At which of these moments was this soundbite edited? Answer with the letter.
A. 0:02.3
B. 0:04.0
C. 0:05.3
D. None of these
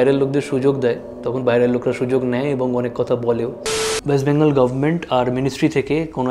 B